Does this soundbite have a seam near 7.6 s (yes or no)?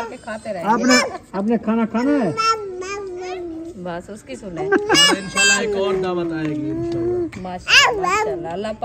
yes